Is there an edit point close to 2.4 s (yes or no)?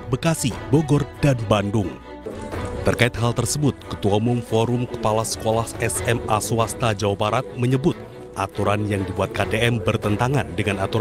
yes